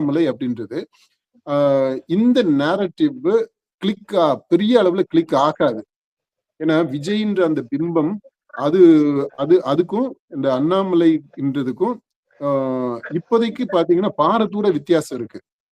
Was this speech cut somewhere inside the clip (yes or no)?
no